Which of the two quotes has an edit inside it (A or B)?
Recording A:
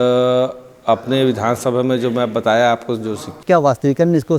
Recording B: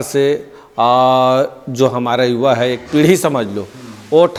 A